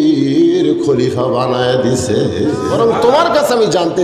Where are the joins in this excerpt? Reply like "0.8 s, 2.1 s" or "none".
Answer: 2.7 s